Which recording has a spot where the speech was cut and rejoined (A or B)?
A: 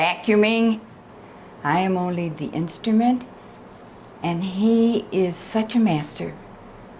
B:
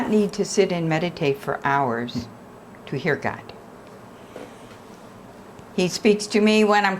A